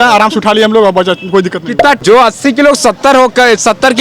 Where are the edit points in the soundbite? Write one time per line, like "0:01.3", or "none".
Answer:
0:02.0

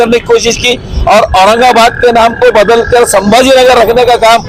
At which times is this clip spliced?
none

